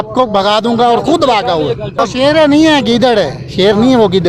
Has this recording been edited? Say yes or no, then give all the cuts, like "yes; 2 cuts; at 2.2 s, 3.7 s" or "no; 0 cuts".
yes; 1 cut; at 2.0 s